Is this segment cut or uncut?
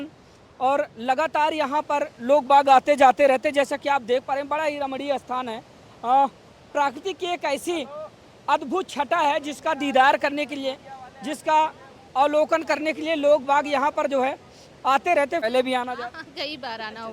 cut